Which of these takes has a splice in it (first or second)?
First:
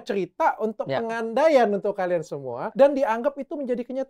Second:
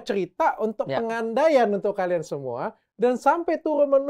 first